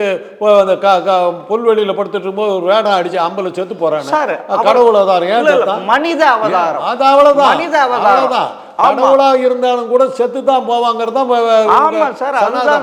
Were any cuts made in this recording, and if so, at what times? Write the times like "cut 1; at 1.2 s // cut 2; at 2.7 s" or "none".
none

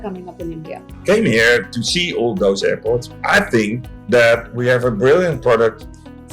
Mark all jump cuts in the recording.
cut 1; at 1.0 s // cut 2; at 3.1 s

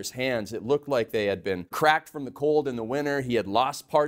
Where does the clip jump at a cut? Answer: cut 1; at 1.7 s

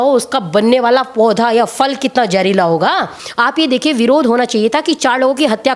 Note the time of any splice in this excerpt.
cut 1; at 3.2 s

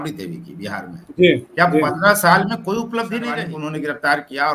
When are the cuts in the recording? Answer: cut 1; at 3.3 s

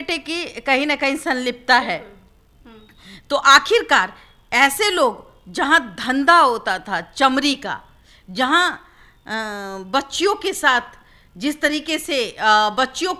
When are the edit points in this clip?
none

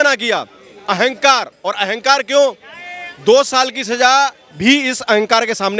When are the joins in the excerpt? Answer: none

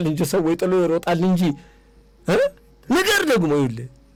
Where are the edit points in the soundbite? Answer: none

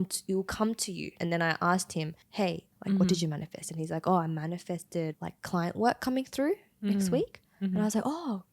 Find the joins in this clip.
cut 1; at 1.1 s // cut 2; at 5.1 s

